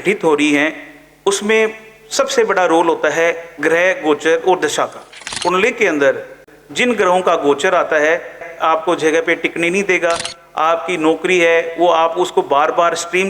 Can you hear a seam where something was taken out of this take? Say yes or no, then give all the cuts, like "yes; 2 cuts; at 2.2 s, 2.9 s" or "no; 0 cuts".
yes; 3 cuts; at 5.2 s, 6.4 s, 8.4 s